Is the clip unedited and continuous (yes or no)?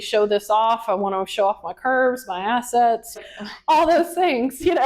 no